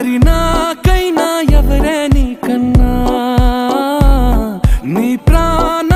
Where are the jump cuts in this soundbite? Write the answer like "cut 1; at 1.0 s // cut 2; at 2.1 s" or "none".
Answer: none